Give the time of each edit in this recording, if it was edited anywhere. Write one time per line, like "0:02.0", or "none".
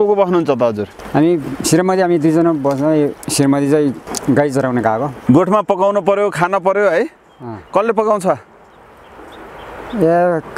0:00.9
0:03.2
0:04.1
0:05.1